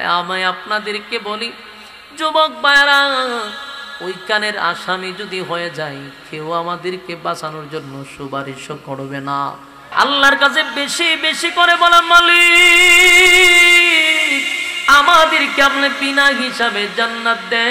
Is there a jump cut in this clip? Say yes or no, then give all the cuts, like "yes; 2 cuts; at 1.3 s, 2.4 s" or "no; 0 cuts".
yes; 1 cut; at 9.9 s